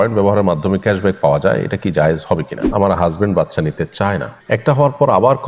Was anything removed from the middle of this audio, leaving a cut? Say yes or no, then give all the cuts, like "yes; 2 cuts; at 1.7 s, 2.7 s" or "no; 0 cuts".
yes; 2 cuts; at 2.7 s, 4.3 s